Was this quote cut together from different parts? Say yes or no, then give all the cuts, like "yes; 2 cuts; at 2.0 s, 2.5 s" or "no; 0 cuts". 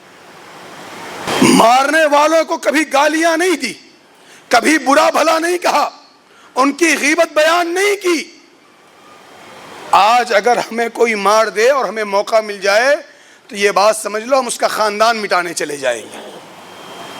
yes; 1 cut; at 1.3 s